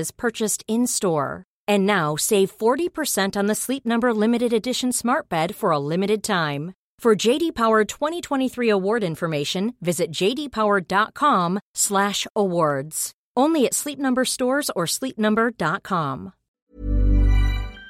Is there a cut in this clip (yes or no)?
yes